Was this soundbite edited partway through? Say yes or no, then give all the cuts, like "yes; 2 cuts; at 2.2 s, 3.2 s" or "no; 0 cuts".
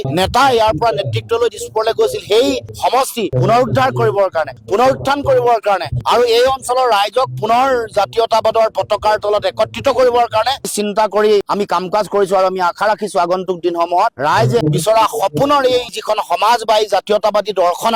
no; 0 cuts